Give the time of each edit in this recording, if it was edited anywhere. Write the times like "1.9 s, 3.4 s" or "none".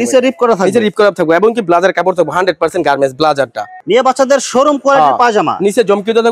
3.7 s